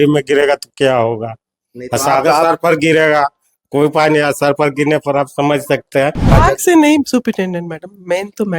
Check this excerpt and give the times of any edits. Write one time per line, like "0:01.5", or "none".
0:06.3